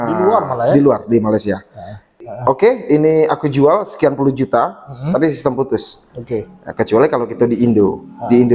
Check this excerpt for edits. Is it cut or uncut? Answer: cut